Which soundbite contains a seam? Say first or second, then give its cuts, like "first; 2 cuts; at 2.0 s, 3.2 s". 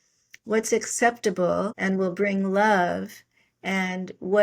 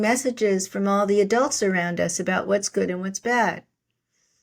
first; 1 cut; at 1.7 s